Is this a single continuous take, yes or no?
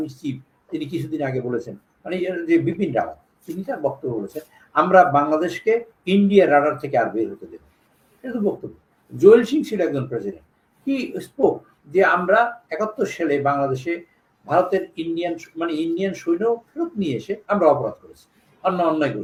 yes